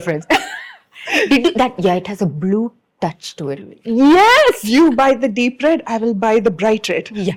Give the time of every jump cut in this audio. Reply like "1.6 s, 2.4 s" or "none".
none